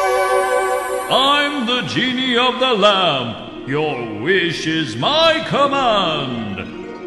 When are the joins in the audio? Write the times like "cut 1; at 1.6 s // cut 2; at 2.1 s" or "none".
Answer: none